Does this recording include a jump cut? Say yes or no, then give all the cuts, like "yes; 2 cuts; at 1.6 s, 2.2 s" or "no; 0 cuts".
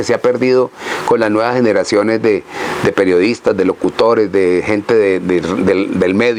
no; 0 cuts